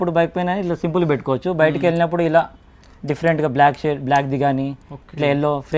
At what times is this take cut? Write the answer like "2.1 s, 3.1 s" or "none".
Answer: none